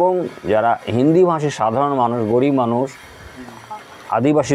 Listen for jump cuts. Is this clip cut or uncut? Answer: uncut